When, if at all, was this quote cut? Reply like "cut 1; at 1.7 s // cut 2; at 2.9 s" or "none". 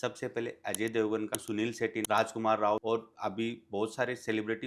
cut 1; at 1.7 s // cut 2; at 2.8 s